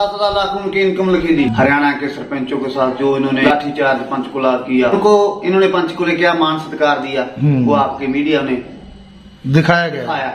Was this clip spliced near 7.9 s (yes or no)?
no